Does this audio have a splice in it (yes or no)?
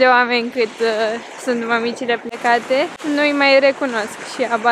no